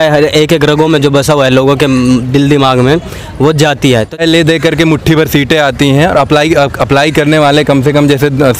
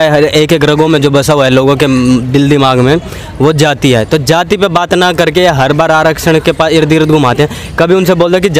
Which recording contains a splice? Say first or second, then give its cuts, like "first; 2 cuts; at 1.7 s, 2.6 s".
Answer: first; 1 cut; at 4.2 s